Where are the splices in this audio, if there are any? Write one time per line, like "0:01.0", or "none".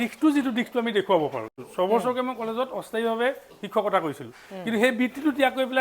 0:01.6